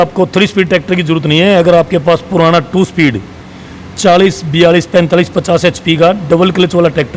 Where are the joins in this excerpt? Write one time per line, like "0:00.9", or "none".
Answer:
none